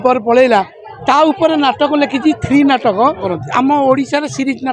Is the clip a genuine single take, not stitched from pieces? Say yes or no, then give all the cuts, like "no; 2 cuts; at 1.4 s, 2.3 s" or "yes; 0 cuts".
no; 1 cut; at 3.4 s